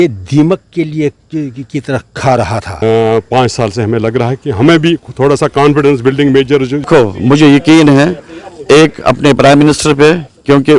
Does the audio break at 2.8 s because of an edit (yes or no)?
yes